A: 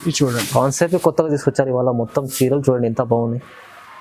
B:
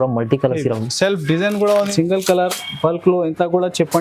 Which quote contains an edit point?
B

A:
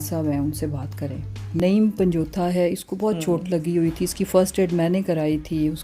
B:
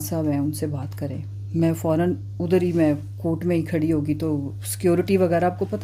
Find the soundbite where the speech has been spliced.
A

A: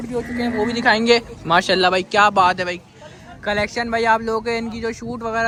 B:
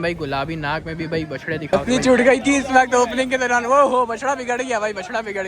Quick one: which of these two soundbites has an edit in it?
B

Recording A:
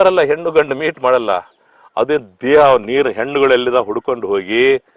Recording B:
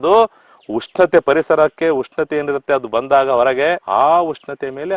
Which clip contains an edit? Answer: B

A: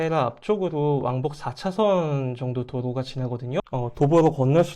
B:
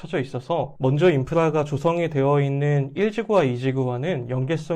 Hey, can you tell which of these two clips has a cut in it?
A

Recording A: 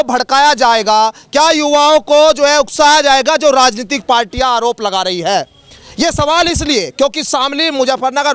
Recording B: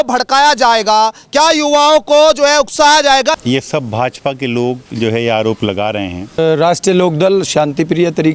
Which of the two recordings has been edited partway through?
B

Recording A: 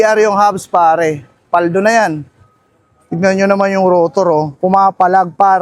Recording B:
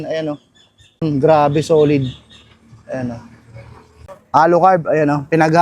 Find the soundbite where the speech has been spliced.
B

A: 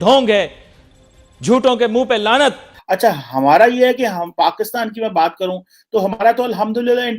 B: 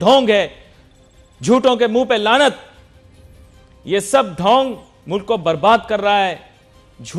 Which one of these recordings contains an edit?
A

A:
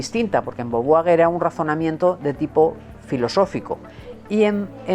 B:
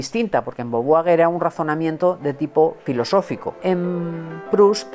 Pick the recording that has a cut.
B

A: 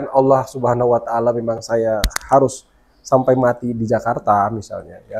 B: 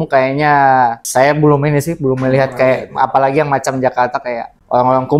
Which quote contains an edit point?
B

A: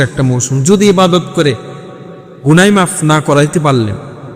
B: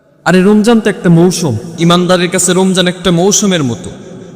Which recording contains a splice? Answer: B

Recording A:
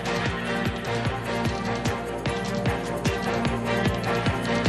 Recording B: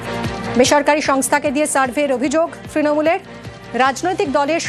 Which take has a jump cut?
A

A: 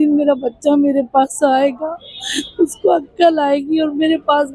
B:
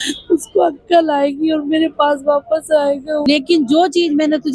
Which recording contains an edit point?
B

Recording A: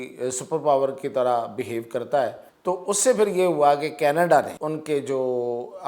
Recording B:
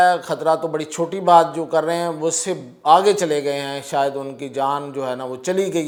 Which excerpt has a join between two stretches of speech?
A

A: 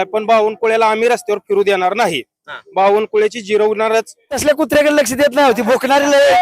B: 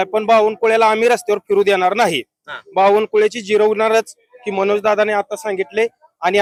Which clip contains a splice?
A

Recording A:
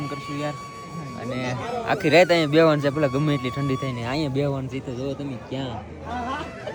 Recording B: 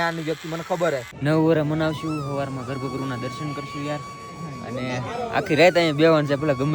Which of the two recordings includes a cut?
B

